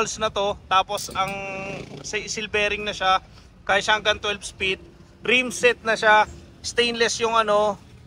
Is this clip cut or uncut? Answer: uncut